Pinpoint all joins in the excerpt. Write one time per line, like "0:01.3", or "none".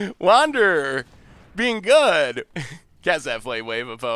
0:02.4